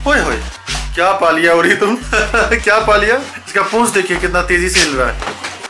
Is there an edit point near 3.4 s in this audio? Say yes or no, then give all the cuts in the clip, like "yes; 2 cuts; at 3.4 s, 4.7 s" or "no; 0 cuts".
yes; 2 cuts; at 2.1 s, 3.4 s